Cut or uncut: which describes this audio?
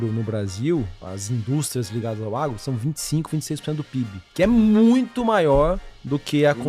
cut